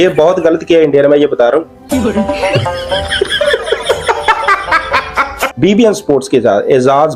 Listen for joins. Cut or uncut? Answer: uncut